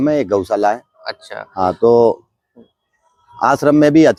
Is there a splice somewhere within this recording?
no; 0 cuts

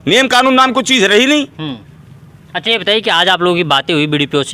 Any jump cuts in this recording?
no; 0 cuts

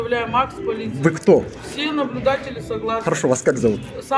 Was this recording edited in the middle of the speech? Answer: no; 0 cuts

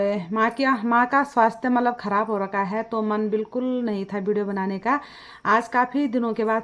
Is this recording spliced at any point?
no; 0 cuts

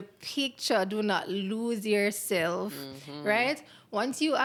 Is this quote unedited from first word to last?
yes; 0 cuts

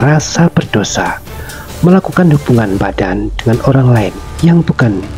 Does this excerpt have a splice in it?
no; 0 cuts

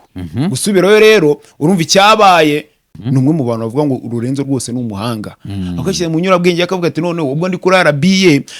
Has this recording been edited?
yes; 1 cut; at 2.9 s

